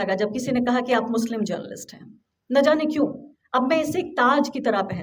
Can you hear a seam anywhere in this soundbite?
no; 0 cuts

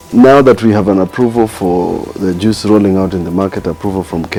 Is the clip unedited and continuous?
yes; 0 cuts

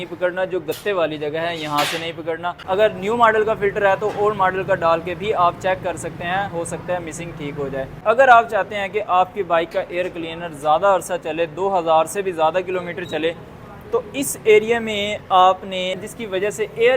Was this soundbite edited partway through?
yes; 3 cuts; at 2.6 s, 8.0 s, 16.0 s

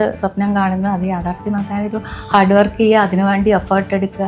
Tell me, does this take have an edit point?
no; 0 cuts

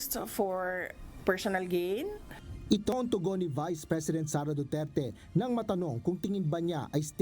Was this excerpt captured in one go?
no; 1 cut; at 4.9 s

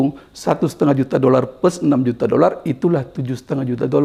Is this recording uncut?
yes; 0 cuts

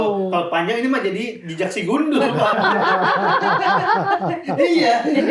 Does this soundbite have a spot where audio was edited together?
no; 0 cuts

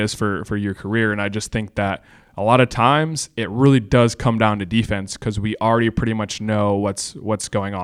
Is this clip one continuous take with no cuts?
yes; 0 cuts

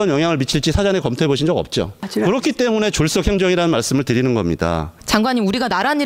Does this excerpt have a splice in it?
yes; 2 cuts; at 2.0 s, 5.0 s

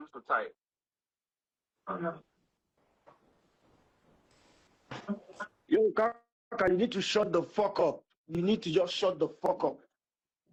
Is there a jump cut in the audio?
no; 0 cuts

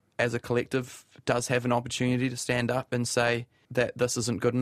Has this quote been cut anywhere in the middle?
yes; 2 cuts; at 2.4 s, 3.6 s

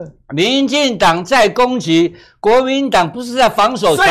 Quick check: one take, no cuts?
yes; 0 cuts

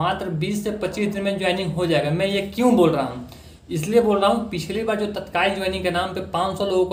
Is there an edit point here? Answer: no; 0 cuts

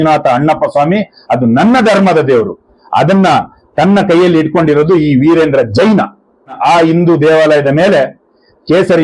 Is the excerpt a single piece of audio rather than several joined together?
no; 1 cut; at 6.5 s

